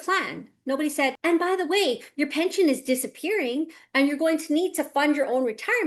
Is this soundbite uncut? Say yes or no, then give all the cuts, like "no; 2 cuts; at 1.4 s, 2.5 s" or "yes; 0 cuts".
yes; 0 cuts